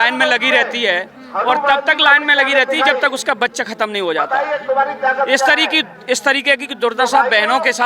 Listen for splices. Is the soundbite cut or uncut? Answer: uncut